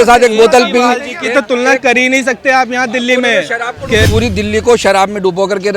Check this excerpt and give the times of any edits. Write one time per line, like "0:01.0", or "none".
0:04.1